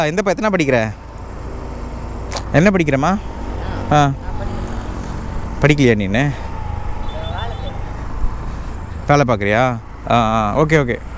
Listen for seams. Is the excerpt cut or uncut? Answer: uncut